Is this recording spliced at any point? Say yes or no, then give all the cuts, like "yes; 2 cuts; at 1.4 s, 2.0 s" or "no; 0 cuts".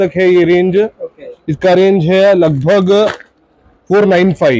no; 0 cuts